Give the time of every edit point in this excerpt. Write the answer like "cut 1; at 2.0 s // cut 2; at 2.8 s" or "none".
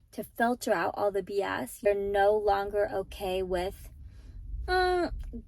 cut 1; at 1.9 s